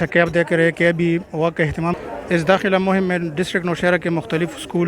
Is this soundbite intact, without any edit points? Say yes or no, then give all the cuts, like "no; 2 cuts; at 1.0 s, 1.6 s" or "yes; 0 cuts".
no; 1 cut; at 2.0 s